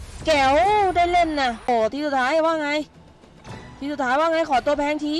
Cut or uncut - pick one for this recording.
cut